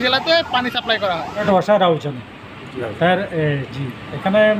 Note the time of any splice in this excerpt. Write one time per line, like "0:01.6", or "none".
0:01.4